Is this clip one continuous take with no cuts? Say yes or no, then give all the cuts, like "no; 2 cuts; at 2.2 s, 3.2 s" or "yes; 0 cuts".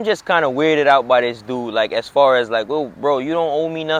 yes; 0 cuts